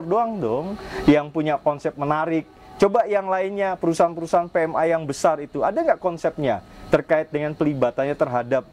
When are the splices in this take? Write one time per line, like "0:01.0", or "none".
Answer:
none